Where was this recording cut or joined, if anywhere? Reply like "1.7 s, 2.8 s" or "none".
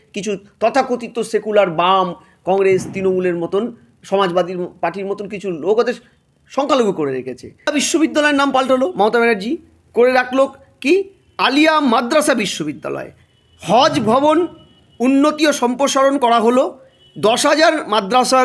7.7 s

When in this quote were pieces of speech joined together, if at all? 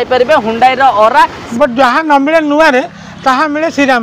1.4 s

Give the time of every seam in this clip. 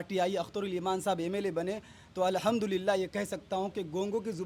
none

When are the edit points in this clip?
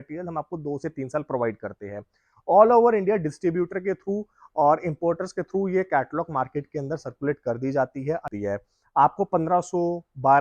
8.3 s

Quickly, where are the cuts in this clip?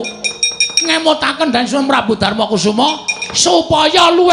none

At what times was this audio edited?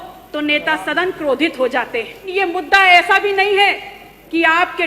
2.3 s

